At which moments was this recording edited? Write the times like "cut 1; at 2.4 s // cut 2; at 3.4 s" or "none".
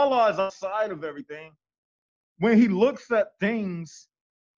none